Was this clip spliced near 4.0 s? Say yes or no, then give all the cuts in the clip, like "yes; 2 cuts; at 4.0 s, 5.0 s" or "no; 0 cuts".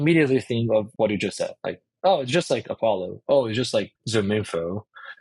yes; 2 cuts; at 0.9 s, 4.0 s